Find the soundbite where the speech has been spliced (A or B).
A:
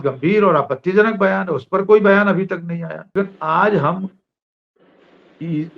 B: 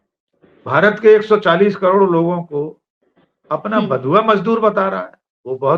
A